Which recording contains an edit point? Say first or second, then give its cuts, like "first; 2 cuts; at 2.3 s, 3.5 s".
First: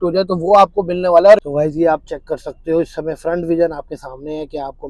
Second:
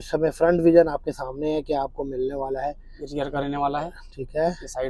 first; 1 cut; at 1.4 s